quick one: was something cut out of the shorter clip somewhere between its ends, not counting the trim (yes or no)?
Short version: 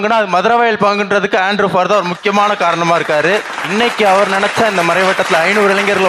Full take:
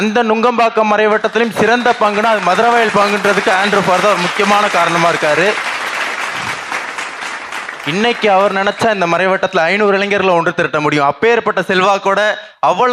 yes